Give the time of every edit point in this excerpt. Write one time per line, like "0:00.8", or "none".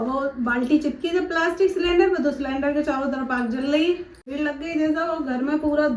0:04.3